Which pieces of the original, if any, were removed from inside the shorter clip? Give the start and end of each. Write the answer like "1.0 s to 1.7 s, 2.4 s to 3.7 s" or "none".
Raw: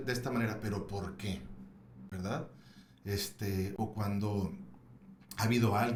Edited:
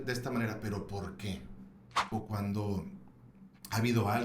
2.1 s to 3.7 s